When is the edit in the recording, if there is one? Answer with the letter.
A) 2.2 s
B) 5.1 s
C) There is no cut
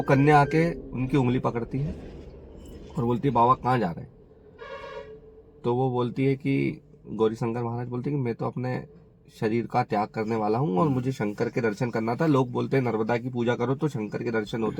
C